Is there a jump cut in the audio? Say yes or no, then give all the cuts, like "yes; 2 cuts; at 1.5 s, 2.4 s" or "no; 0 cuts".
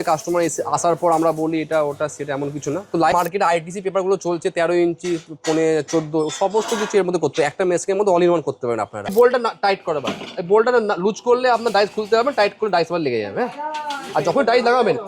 yes; 2 cuts; at 3.1 s, 9.1 s